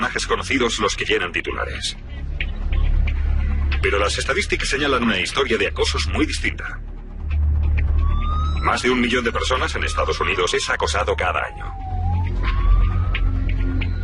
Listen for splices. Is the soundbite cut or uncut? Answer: uncut